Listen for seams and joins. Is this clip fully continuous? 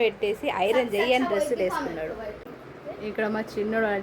no; 1 cut; at 2.4 s

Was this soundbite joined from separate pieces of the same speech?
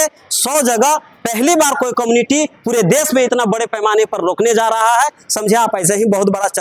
no; 0 cuts

